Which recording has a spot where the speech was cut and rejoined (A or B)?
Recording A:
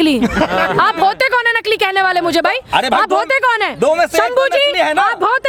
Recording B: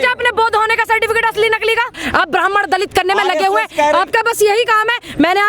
B